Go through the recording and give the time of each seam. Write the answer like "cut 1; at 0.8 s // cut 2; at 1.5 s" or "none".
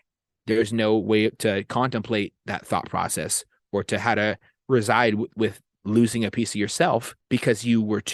cut 1; at 7.1 s